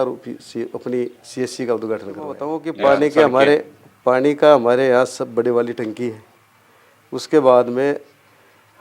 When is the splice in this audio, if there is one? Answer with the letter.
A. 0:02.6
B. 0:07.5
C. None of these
A